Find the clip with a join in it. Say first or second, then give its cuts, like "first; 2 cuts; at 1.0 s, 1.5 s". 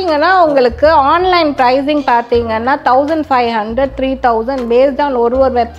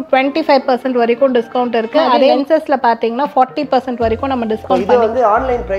second; 2 cuts; at 2.4 s, 4.7 s